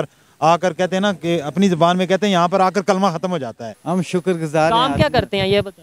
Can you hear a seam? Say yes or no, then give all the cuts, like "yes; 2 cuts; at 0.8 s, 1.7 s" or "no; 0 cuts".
yes; 1 cut; at 3.7 s